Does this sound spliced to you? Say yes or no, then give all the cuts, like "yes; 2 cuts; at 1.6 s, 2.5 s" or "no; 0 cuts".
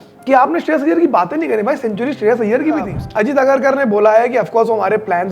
yes; 1 cut; at 2.9 s